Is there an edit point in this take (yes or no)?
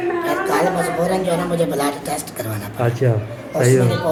no